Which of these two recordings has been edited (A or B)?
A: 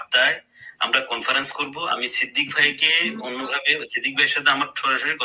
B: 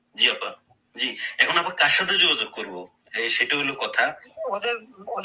B